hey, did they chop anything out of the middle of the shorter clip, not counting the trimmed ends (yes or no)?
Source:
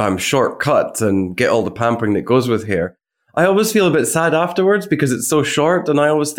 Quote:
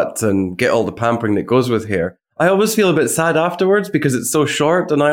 yes